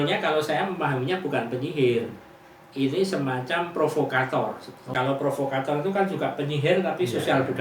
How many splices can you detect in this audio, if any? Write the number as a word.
one